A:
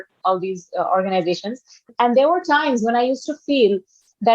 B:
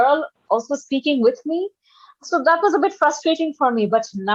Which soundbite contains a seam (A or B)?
A